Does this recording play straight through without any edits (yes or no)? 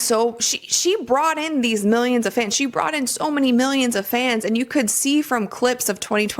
no